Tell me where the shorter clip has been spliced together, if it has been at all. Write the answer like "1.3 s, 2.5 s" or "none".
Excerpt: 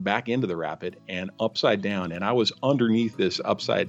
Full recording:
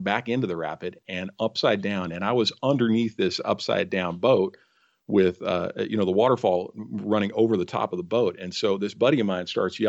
none